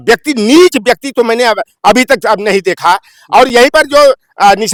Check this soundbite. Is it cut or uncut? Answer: uncut